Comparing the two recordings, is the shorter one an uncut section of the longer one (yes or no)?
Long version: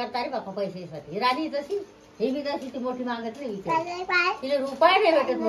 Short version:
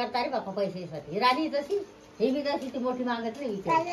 yes